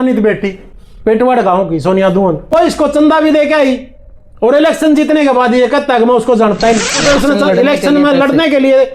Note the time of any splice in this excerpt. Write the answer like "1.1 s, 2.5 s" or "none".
2.7 s, 7.0 s